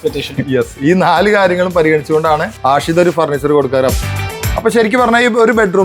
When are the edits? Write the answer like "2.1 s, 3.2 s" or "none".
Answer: 2.5 s, 4.0 s